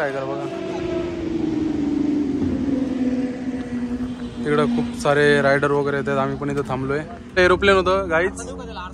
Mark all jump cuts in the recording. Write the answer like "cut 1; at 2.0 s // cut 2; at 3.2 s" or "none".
cut 1; at 7.2 s